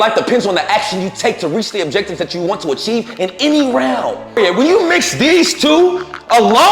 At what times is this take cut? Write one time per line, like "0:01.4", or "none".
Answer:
0:04.4